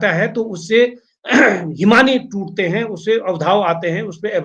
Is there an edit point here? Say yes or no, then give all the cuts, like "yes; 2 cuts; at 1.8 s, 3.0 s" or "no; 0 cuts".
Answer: no; 0 cuts